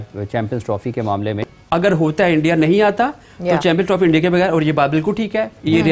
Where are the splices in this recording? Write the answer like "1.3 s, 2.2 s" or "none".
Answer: 1.5 s